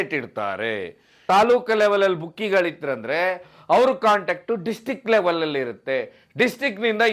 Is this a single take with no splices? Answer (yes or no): no